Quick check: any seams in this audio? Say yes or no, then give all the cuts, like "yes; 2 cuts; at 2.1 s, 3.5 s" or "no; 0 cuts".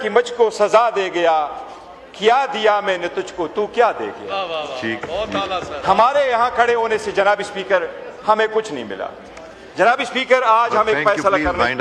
no; 0 cuts